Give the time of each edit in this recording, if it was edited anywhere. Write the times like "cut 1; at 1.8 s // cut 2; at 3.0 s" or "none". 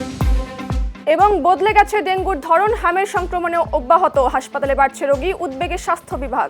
cut 1; at 1.2 s